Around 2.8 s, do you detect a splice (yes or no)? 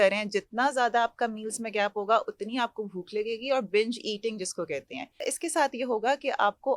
no